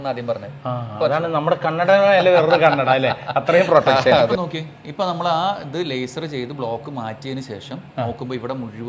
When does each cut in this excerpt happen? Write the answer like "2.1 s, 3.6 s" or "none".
4.4 s